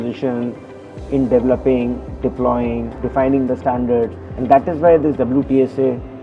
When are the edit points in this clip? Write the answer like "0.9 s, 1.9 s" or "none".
3.0 s